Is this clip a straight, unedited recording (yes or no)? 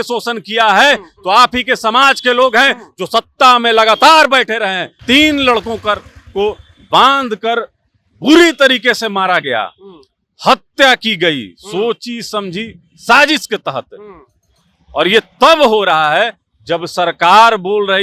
no